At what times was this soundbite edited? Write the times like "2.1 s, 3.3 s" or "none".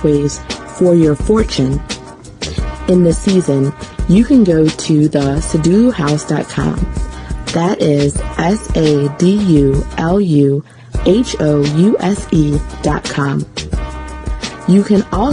1.2 s